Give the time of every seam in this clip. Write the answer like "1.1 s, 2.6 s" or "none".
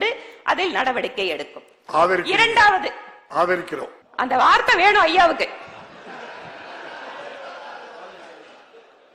4.0 s